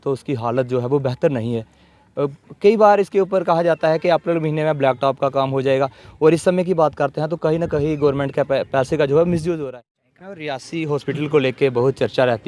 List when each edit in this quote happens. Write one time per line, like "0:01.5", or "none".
0:09.6